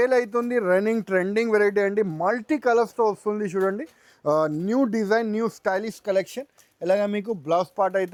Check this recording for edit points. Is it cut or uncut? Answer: uncut